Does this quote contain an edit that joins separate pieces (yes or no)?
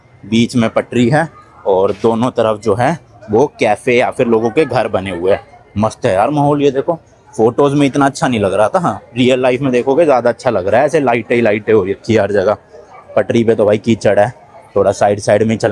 no